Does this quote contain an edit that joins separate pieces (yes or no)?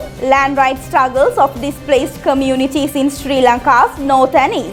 no